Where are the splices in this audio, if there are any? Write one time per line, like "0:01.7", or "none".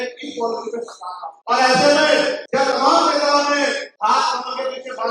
0:01.3
0:02.4
0:03.9